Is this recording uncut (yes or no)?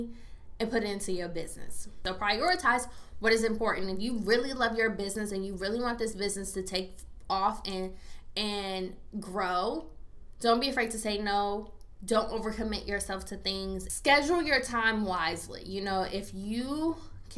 no